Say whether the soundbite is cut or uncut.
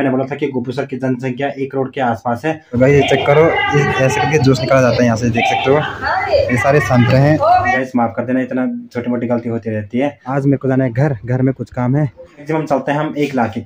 cut